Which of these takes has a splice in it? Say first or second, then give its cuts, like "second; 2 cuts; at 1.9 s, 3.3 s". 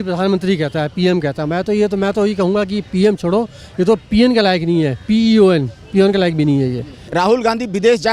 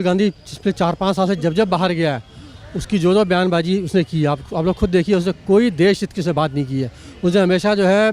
first; 1 cut; at 7.1 s